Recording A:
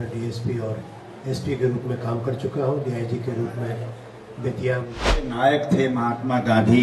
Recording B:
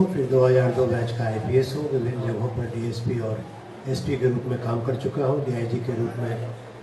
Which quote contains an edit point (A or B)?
A